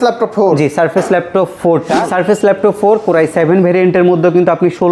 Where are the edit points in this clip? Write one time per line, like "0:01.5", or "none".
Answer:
0:02.1